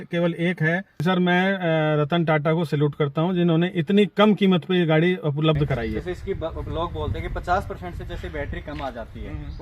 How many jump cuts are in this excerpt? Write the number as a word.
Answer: two